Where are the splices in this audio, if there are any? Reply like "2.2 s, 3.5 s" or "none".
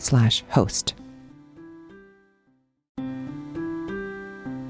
2.9 s